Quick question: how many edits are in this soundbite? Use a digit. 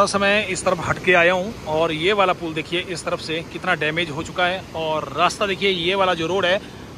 0